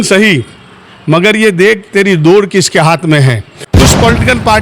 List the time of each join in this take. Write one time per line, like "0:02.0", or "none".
0:03.6